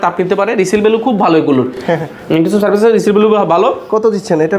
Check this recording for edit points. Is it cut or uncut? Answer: uncut